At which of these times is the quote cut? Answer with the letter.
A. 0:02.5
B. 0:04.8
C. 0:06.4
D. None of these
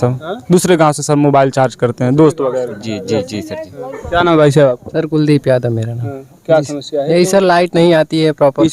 D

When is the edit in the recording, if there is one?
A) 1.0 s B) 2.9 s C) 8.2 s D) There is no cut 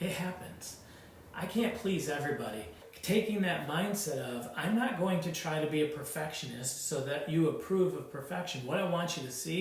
B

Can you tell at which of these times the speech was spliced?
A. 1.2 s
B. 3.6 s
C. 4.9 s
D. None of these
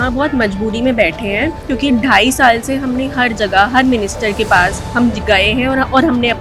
D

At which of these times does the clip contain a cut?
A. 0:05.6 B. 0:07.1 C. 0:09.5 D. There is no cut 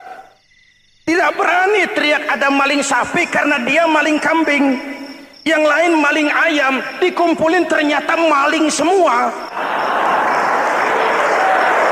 C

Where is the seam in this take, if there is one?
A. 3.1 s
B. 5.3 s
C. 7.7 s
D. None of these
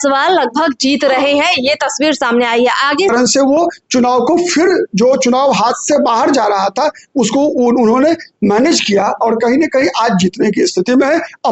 A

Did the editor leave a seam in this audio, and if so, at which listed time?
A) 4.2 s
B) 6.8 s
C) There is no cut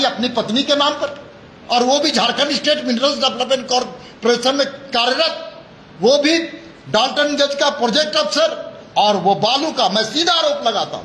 C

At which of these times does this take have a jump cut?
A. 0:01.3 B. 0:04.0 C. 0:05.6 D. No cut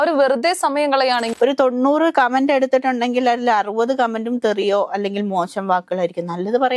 A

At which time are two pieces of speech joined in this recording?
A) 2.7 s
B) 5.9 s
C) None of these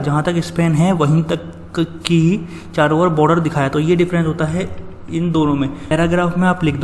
B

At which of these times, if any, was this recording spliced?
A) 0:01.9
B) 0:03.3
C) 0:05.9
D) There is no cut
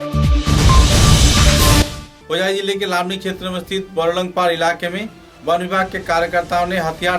D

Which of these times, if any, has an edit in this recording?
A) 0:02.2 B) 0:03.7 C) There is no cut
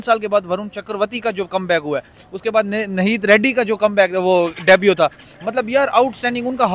C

